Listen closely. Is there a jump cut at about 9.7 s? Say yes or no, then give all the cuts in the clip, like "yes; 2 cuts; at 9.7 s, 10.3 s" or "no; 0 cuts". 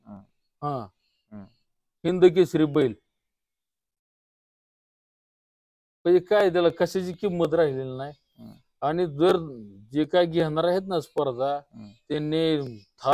no; 0 cuts